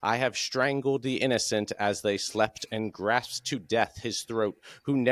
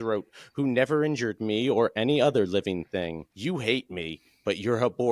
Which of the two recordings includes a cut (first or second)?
second